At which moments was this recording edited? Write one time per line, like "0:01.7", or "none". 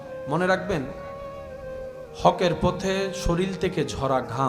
0:00.9
0:02.2